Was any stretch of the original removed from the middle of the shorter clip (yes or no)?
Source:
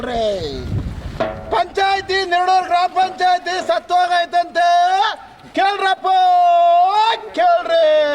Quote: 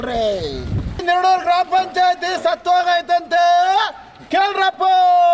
yes